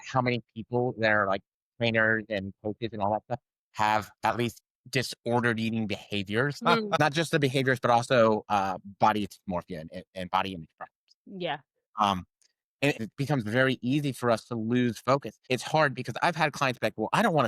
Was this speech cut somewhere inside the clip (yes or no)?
yes